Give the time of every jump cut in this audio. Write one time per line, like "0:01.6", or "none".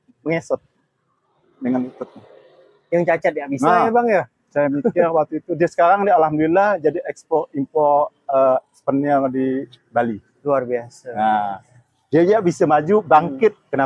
none